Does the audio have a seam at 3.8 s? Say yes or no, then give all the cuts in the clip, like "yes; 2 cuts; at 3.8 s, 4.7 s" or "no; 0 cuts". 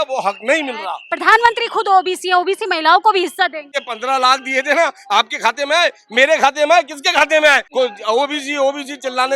yes; 3 cuts; at 1.0 s, 3.8 s, 7.6 s